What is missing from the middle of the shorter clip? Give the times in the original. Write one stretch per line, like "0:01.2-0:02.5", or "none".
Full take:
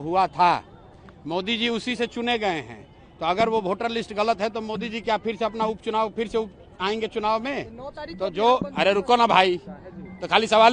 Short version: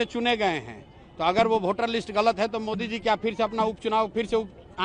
none

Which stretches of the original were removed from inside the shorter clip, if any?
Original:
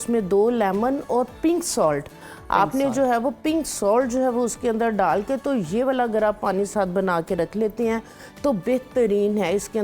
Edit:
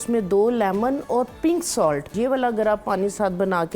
0:02.1-0:05.7

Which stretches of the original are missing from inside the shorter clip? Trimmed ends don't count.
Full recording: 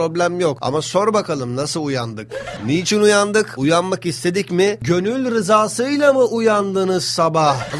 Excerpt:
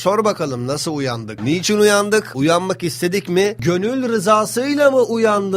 0:02.2-0:02.5

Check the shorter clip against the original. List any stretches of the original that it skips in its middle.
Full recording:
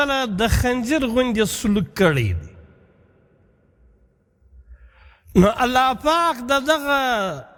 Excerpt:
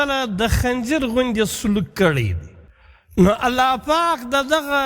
0:03.2-0:05.4

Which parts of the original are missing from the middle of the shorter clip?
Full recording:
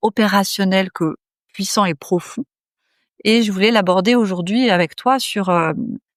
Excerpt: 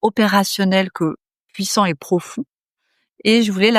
none

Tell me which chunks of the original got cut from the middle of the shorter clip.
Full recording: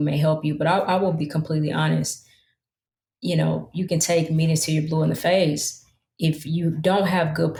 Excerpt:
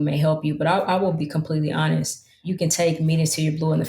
0:02.4-0:03.7

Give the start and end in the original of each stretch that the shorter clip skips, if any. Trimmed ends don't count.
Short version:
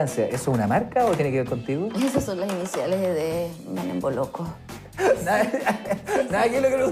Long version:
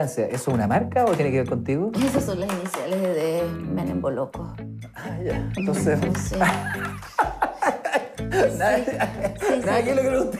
0:04.8-0:08.2

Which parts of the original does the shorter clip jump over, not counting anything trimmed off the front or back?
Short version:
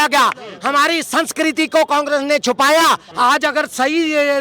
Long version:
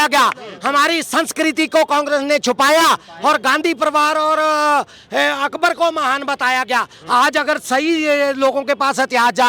0:03.1-0:07.0

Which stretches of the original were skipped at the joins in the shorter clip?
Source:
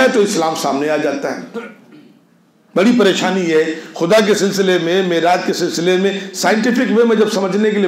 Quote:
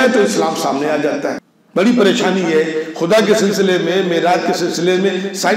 0:01.5-0:02.5

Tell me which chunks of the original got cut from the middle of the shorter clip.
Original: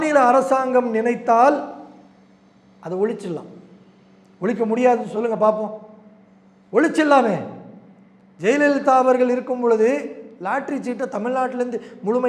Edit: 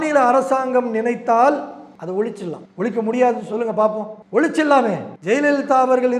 0:01.9-0:02.7
0:03.5-0:04.3
0:05.8-0:06.5
0:07.5-0:08.3

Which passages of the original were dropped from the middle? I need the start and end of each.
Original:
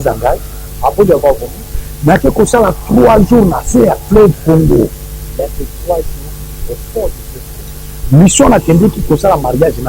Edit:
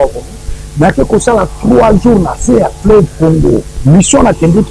0:05.0-0:08.0

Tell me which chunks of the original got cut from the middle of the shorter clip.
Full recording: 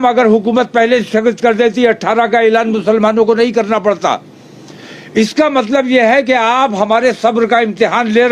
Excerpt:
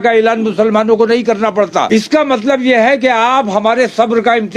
0:04.1-0:05.1

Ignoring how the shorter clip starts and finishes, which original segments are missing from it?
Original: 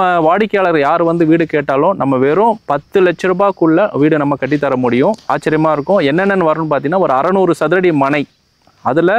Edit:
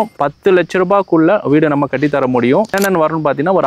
0:05.2-0:06.2

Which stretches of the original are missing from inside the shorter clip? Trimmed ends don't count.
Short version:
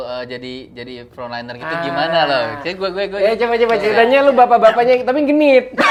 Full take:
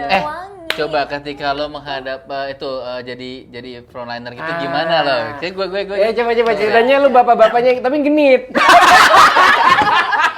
none

